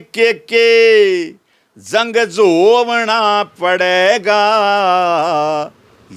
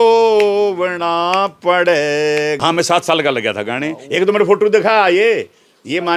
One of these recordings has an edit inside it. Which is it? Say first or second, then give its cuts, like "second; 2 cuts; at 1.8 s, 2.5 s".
second; 1 cut; at 2.6 s